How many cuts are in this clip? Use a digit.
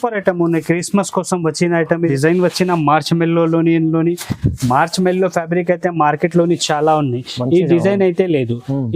1